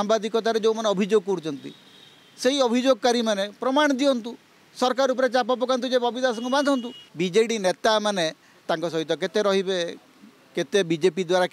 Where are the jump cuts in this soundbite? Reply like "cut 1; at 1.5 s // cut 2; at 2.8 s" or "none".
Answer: cut 1; at 7.0 s